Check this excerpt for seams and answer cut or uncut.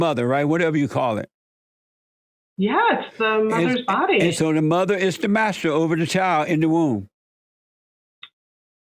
uncut